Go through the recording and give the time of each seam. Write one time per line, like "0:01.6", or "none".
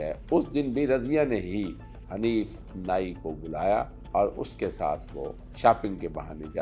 0:04.0
0:05.4